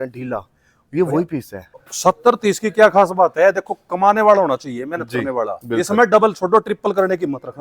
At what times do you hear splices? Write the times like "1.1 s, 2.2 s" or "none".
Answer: 1.9 s